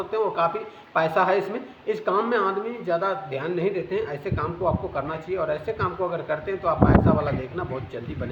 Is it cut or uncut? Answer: uncut